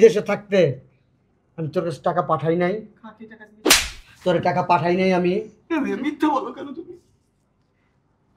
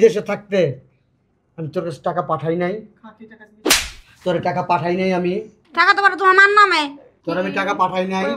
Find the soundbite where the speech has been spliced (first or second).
second